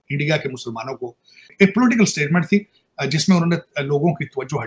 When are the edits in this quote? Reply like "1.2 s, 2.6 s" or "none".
1.4 s